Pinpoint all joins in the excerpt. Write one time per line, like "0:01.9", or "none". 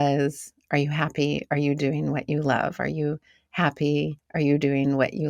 0:04.2